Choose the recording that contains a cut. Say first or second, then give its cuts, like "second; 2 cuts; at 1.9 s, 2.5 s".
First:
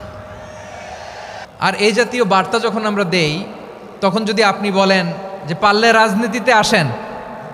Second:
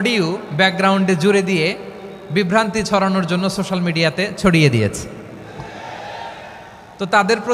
first; 1 cut; at 1.4 s